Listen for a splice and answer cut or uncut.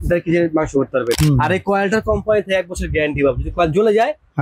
cut